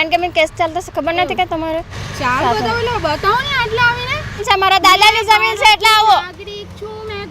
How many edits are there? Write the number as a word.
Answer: two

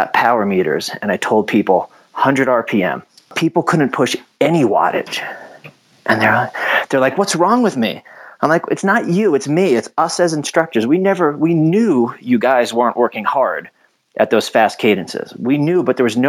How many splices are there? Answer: one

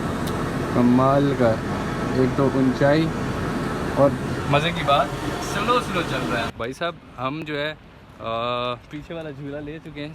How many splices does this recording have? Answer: one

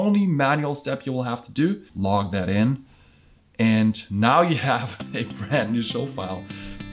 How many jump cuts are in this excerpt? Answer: one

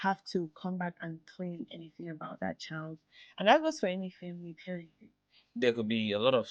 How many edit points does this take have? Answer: one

